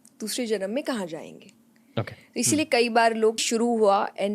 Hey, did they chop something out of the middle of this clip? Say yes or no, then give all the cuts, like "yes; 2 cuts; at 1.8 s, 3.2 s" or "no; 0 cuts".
yes; 1 cut; at 3.4 s